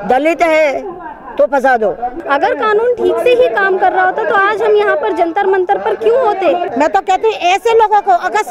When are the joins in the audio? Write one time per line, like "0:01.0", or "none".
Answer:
0:02.1
0:06.7

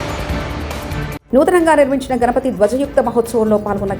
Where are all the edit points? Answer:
0:01.2

